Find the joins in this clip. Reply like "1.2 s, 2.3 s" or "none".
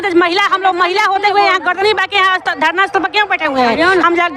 none